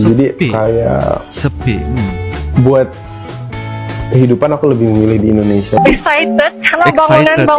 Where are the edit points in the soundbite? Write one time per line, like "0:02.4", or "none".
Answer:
0:05.8